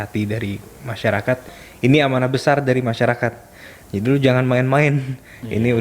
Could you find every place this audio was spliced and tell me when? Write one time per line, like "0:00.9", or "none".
0:01.6